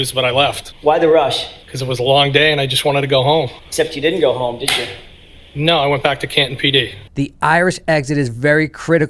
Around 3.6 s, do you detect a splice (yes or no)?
yes